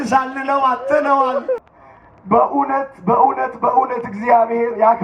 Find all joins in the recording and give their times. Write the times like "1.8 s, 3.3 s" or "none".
1.7 s